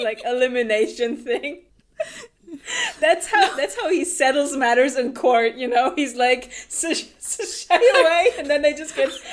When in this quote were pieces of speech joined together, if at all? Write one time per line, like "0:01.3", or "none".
0:01.8